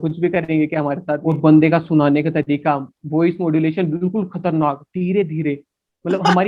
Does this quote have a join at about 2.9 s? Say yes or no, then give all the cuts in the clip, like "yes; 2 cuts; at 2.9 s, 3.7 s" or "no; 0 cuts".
no; 1 cut; at 1.2 s